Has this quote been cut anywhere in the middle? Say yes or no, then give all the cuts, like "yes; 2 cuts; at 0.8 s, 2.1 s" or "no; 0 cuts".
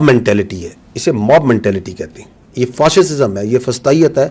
no; 0 cuts